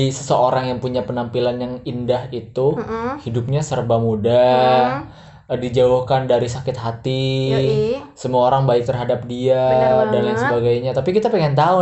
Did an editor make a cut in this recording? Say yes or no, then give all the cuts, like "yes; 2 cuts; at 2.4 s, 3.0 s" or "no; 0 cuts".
no; 0 cuts